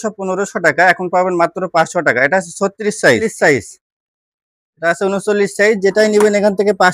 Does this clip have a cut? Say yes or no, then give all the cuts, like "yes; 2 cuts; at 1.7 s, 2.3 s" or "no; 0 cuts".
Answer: yes; 1 cut; at 3.2 s